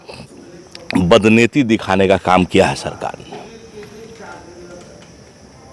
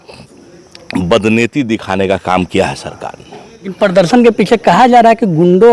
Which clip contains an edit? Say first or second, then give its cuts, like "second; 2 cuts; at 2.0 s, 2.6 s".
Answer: second; 1 cut; at 3.7 s